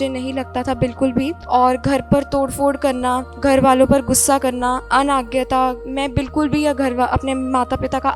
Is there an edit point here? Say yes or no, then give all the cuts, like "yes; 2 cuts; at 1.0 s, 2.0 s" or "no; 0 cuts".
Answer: yes; 4 cuts; at 1.4 s, 3.3 s, 4.8 s, 5.8 s